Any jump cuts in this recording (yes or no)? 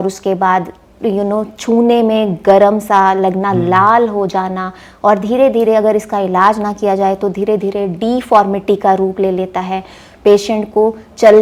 no